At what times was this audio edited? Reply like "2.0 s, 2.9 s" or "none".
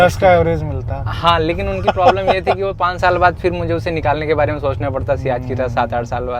none